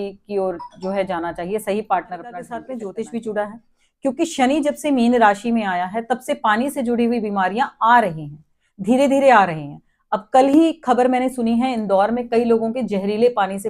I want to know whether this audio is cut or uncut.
cut